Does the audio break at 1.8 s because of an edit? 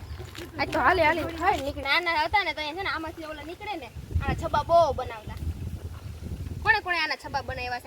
yes; 1 cut; at 1.8 s

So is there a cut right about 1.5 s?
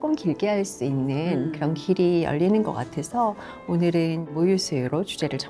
no; 1 cut; at 4.2 s

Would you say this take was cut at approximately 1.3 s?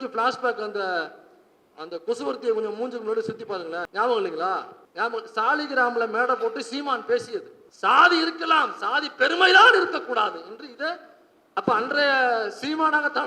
no; 3 cuts; at 3.9 s, 4.8 s, 7.6 s

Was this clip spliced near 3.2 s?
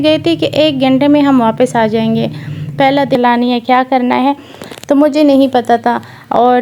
yes; 1 cut; at 3.2 s

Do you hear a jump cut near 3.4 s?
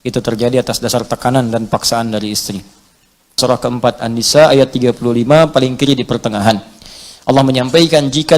yes; 1 cut; at 3.4 s

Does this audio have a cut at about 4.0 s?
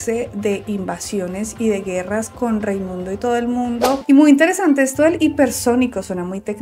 yes; 1 cut; at 4.0 s

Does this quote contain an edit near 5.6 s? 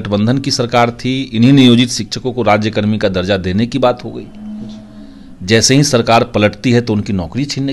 no; 0 cuts

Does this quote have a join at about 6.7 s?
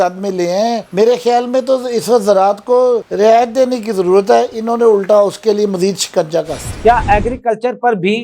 yes; 1 cut; at 6.7 s

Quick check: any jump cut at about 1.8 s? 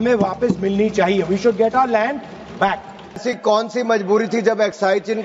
no; 1 cut; at 3.2 s

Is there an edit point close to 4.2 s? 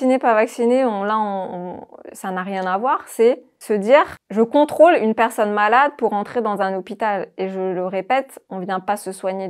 yes; 2 cuts; at 3.5 s, 4.2 s

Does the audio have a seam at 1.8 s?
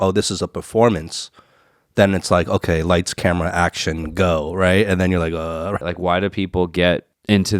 no; 1 cut; at 5.8 s

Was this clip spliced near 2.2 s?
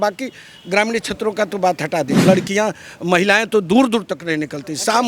yes; 1 cut; at 2.2 s

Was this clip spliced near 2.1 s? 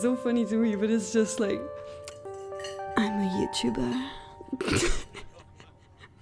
no; 0 cuts

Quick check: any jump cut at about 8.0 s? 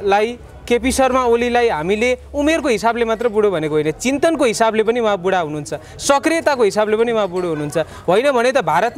no; 0 cuts

